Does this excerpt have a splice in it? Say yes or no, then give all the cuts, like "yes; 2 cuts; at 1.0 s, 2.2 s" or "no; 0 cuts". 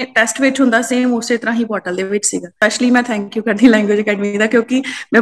yes; 1 cut; at 2.5 s